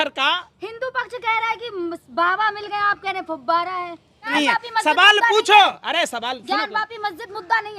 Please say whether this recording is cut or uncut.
cut